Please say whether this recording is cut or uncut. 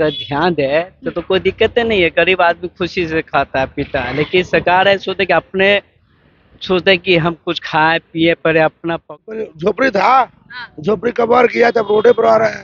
cut